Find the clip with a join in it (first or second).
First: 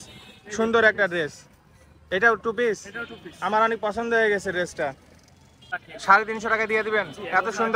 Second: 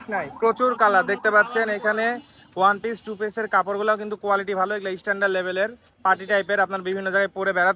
first